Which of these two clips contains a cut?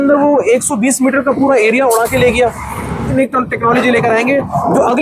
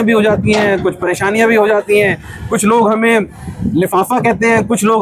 first; 1 cut; at 3.1 s

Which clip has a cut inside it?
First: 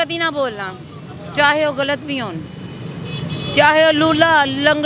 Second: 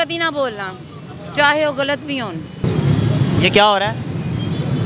second; 1 cut; at 2.6 s

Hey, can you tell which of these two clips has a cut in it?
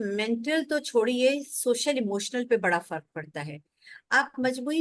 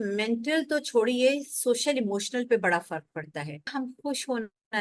second; 1 cut; at 3.7 s

